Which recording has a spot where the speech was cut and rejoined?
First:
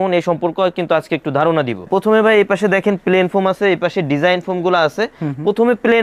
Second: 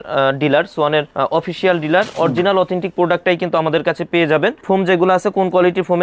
first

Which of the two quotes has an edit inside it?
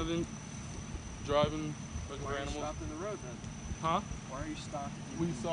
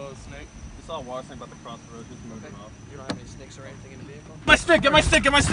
second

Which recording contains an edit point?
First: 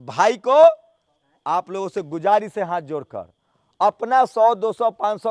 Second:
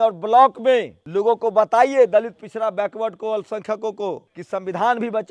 second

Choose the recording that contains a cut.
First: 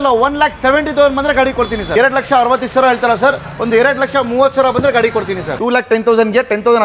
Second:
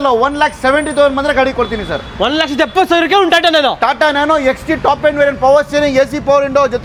first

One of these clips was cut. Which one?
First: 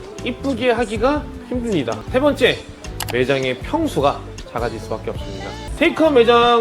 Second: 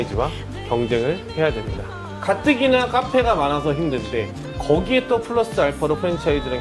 first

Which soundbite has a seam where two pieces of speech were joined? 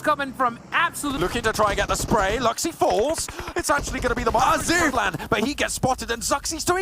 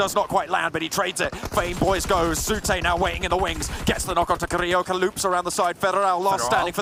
first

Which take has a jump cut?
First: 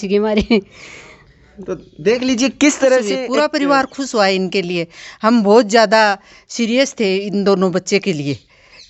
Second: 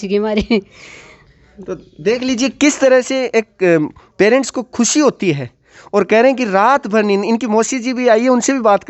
first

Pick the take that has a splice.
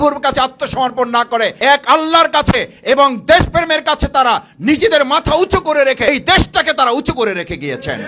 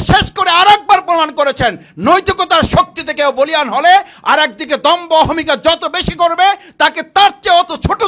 first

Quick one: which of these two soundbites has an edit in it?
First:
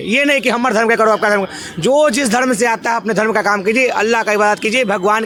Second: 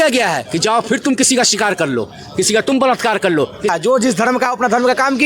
second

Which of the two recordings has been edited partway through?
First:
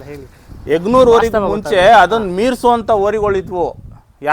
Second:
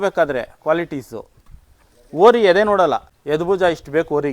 second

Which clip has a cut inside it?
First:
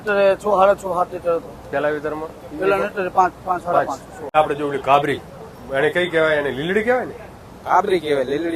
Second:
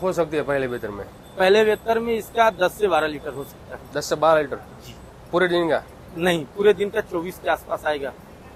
first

